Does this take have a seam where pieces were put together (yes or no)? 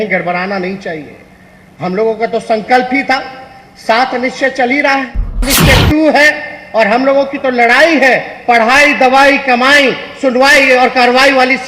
yes